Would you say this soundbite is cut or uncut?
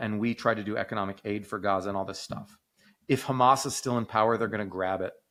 uncut